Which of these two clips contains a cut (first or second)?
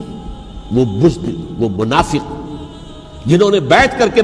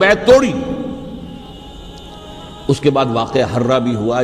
second